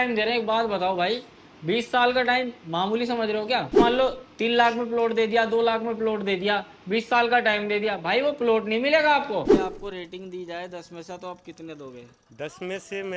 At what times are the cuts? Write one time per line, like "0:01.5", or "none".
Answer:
0:03.8
0:09.5

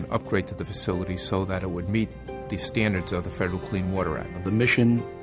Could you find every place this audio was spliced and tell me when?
0:04.3

